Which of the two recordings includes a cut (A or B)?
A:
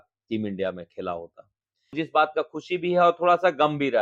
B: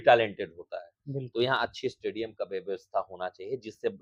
A